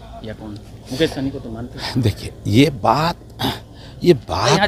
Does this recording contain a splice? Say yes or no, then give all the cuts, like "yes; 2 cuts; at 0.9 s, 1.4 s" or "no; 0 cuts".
no; 0 cuts